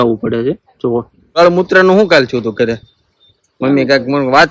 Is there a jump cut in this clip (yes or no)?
yes